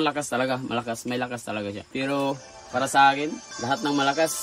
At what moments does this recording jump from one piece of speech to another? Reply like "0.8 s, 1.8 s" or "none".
1.8 s, 3.5 s